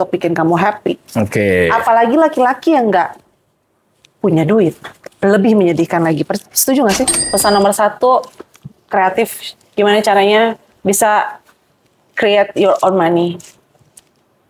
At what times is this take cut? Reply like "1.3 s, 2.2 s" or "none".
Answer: 7.2 s